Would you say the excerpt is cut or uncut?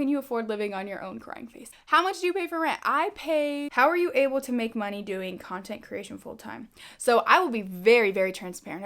cut